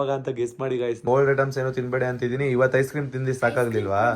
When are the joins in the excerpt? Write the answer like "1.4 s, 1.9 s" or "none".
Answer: 1.0 s

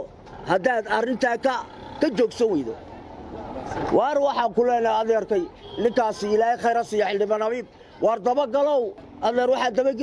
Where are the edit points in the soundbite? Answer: 9.0 s

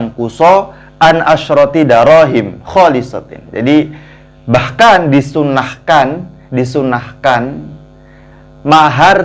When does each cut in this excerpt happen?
none

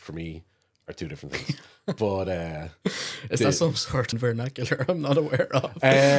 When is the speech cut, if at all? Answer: 4.1 s

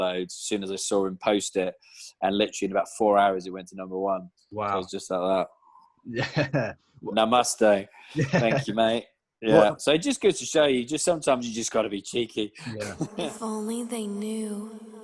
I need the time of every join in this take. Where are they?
13.1 s

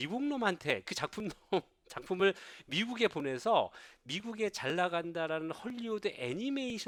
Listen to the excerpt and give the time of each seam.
none

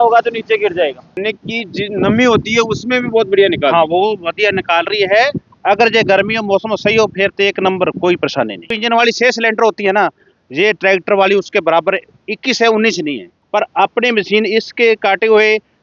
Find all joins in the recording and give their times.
1.2 s, 8.8 s, 13.3 s

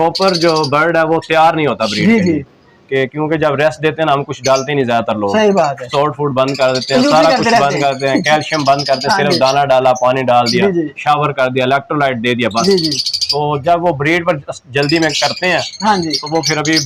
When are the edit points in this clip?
none

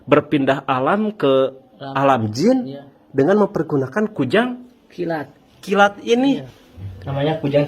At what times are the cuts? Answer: 6.5 s

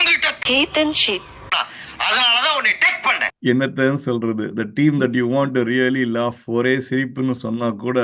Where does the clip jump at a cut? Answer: 3.3 s

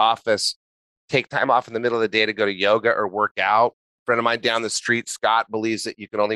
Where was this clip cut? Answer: 3.9 s

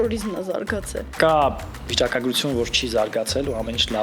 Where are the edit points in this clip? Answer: 1.1 s

